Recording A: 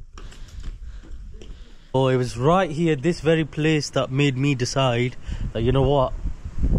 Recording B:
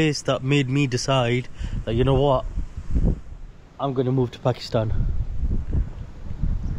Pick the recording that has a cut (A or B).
A